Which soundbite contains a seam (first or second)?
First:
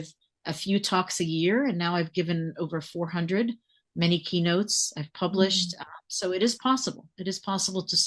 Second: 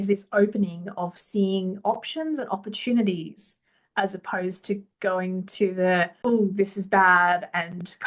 second